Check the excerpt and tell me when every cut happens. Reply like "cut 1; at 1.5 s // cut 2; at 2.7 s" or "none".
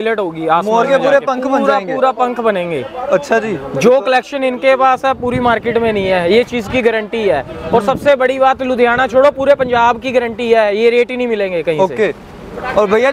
none